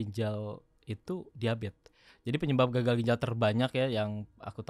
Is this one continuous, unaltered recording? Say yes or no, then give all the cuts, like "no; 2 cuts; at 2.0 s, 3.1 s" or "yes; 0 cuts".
yes; 0 cuts